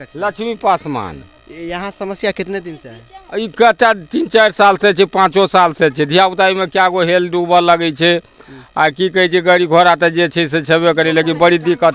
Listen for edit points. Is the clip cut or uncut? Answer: uncut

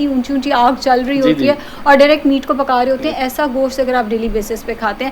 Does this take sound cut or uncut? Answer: uncut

